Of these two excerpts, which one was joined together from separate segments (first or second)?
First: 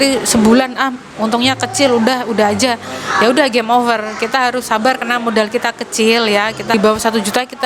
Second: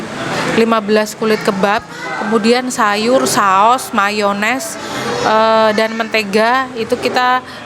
first